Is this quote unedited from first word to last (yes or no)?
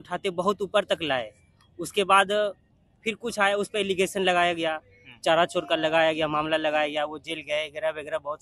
yes